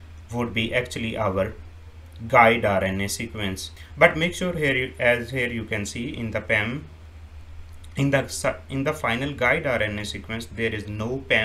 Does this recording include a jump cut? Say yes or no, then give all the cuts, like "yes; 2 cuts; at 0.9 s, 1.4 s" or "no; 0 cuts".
no; 0 cuts